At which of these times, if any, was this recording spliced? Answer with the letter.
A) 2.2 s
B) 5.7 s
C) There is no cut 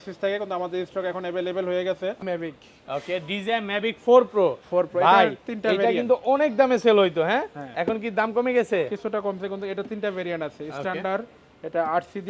A